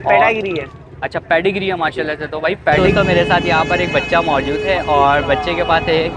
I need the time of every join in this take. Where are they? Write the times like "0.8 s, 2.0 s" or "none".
2.8 s